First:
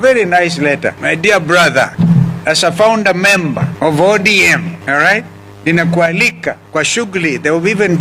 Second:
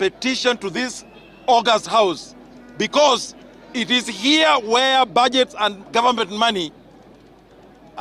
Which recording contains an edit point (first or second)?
first